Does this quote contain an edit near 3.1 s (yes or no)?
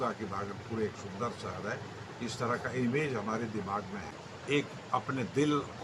no